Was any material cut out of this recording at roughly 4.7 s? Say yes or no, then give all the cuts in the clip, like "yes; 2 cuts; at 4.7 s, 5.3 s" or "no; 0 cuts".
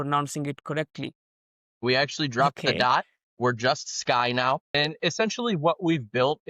yes; 1 cut; at 4.7 s